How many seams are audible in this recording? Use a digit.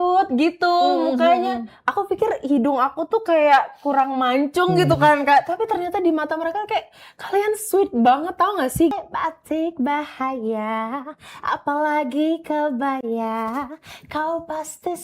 1